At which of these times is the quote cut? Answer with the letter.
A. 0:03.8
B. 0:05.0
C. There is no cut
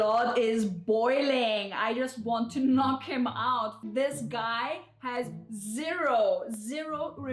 A